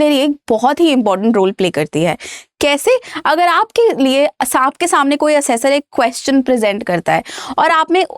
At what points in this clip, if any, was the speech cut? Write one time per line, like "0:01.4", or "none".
none